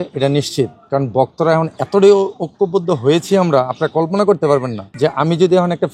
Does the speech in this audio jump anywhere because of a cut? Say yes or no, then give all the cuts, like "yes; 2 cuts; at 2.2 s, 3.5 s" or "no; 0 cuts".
yes; 1 cut; at 4.8 s